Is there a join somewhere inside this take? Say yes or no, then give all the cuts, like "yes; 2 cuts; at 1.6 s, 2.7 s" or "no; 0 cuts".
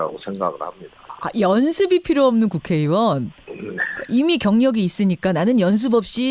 no; 0 cuts